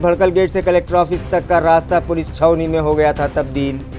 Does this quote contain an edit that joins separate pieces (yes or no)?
no